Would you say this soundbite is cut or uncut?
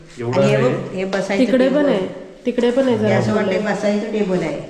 uncut